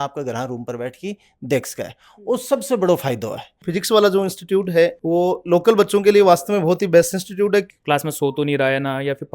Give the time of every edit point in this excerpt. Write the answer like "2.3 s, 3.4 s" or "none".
3.6 s, 7.7 s